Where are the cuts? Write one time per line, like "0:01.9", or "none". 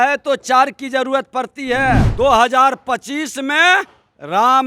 0:02.1